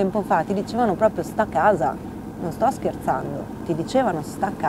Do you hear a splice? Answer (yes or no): no